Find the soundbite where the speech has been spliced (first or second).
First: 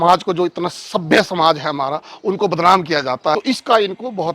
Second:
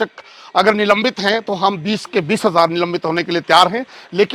first